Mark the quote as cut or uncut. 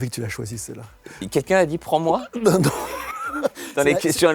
cut